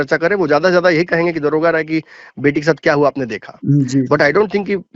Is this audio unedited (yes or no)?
yes